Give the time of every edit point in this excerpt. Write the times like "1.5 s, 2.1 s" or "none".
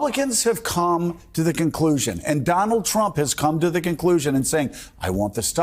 none